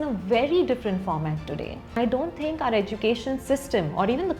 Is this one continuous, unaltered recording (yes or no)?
no